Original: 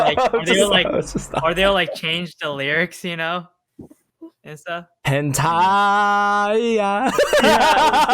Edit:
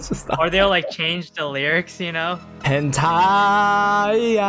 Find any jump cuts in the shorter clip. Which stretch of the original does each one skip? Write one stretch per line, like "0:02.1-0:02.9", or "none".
0:03.5-0:04.9